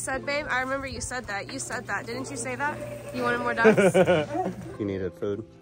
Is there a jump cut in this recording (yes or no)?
yes